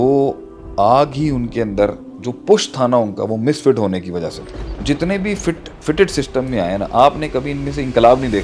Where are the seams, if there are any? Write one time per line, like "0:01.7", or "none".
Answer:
none